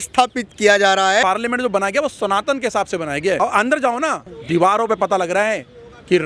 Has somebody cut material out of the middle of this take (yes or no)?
yes